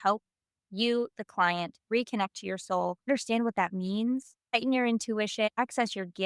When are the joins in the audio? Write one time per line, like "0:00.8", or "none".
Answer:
0:01.8
0:03.1
0:04.4
0:05.5